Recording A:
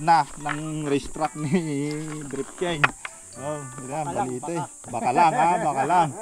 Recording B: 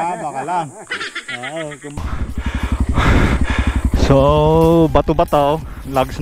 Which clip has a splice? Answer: B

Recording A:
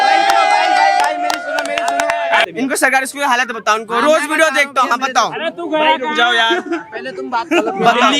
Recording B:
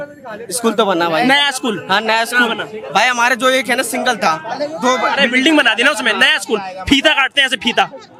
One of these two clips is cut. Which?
A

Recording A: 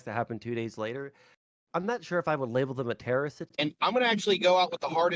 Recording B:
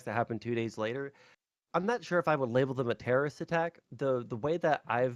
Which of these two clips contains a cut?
A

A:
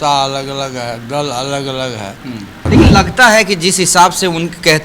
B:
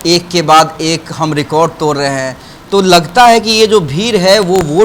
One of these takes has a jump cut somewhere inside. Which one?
A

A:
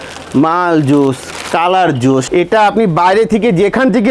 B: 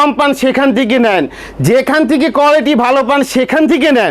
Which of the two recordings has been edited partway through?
A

